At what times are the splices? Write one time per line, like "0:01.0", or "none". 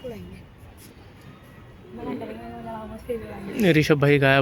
none